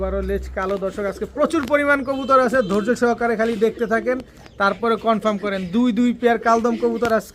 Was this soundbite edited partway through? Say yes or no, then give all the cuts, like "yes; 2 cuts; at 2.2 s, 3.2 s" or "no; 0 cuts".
no; 0 cuts